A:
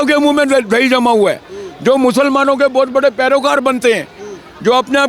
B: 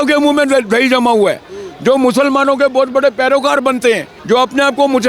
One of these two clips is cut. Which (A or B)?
B